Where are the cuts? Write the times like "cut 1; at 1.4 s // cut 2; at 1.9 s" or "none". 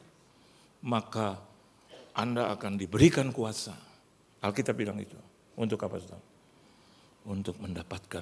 none